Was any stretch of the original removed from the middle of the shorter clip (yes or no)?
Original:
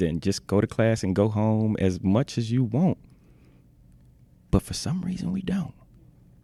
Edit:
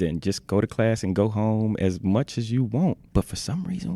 yes